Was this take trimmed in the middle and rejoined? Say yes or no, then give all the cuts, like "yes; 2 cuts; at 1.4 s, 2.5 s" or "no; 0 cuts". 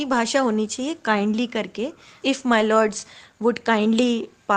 yes; 1 cut; at 2.1 s